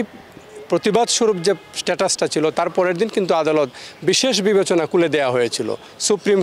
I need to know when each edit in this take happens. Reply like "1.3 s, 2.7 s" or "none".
none